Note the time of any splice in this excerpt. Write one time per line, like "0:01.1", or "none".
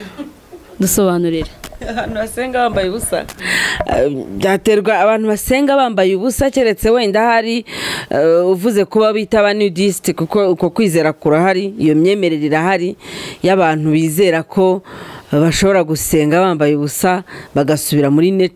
none